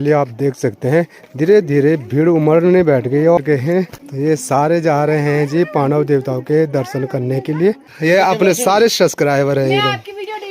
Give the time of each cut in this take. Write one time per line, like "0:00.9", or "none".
0:03.4
0:07.9